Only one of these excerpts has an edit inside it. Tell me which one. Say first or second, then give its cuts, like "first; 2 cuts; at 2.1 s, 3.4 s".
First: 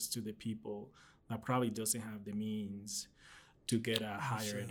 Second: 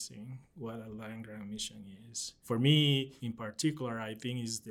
second; 2 cuts; at 2.3 s, 3.2 s